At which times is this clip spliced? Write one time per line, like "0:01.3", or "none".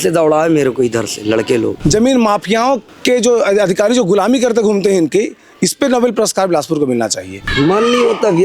0:01.8
0:02.9
0:07.4

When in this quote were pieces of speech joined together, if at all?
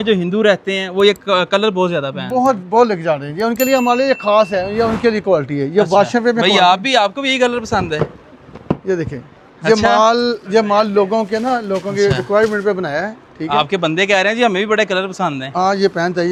none

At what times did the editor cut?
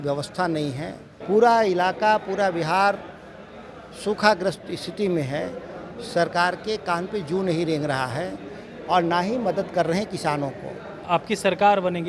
0:01.1
0:11.1

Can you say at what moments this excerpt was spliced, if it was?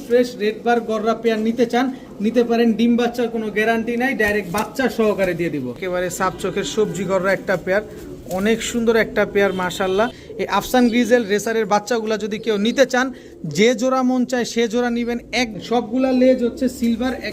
0:05.8
0:10.3
0:15.6

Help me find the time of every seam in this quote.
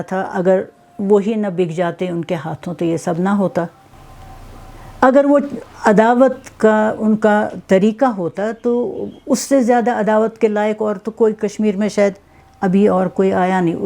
0:03.8

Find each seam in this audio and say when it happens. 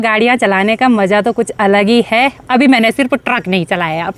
none

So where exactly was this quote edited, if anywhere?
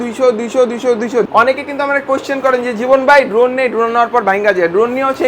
0:01.3

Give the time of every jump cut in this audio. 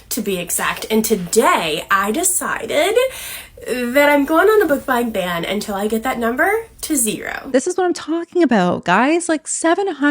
0:07.4

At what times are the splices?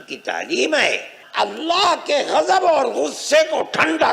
0:01.1

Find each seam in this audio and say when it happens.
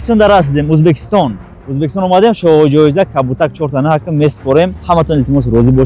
0:04.8

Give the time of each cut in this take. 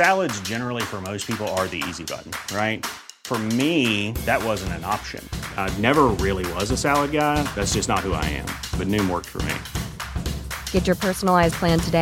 none

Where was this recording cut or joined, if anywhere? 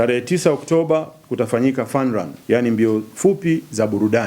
0:02.3

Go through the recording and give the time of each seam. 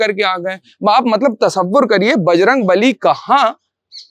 none

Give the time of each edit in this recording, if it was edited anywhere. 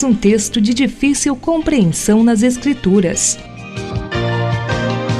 0:03.3

